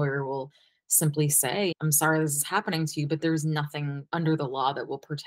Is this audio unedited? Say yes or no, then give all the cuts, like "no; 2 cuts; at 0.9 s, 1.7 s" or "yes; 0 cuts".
yes; 0 cuts